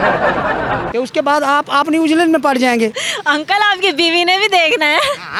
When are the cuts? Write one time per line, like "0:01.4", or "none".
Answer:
none